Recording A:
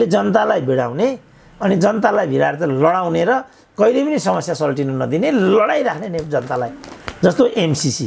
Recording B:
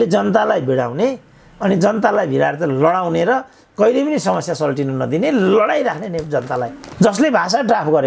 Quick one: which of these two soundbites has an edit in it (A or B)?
B